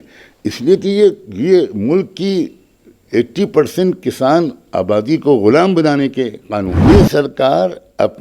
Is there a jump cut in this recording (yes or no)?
yes